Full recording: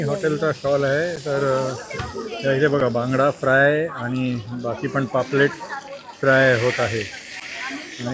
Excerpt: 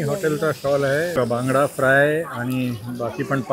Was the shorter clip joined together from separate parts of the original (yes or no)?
yes